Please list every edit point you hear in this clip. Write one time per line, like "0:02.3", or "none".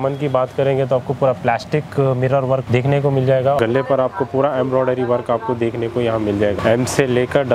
0:02.6
0:03.6
0:06.6